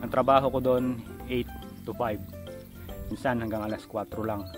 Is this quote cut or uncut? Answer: cut